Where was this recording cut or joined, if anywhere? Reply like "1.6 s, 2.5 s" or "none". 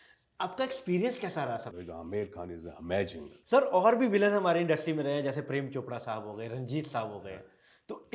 1.7 s, 3.3 s